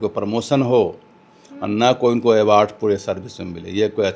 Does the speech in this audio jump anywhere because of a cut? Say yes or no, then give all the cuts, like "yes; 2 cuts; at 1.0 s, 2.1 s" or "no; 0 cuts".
no; 0 cuts